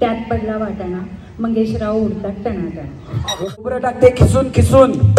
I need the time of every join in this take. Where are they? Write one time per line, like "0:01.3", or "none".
0:03.7